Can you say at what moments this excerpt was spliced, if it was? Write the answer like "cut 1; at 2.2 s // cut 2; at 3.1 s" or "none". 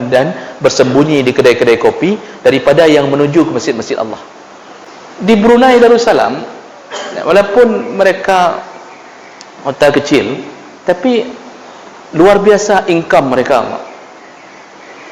cut 1; at 4.8 s